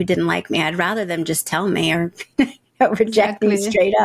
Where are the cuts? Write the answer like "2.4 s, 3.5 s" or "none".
none